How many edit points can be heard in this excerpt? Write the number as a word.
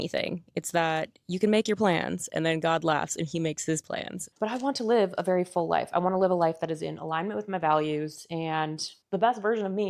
one